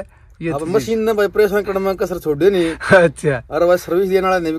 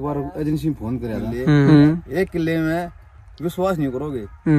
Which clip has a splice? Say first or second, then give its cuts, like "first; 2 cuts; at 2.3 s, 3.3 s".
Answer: second; 1 cut; at 1.7 s